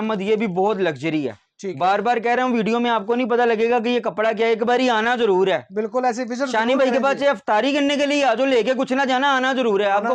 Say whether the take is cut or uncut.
uncut